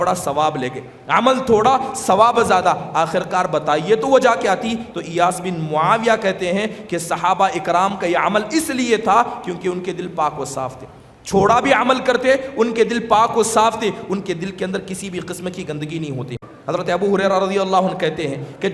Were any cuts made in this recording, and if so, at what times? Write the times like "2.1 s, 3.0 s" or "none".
16.4 s